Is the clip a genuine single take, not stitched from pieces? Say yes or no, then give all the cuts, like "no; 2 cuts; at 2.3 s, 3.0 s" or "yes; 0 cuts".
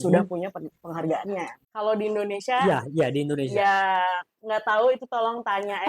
no; 1 cut; at 1.6 s